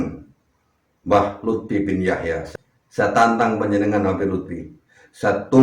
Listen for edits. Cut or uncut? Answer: cut